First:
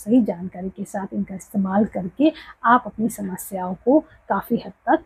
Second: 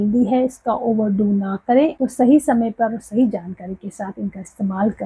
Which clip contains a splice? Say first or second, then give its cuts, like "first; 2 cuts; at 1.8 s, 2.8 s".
second; 1 cut; at 2.0 s